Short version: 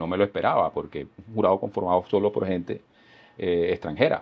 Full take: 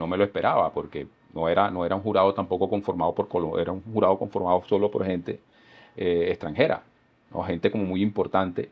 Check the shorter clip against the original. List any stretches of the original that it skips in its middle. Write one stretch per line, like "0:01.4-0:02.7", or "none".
0:01.2-0:03.8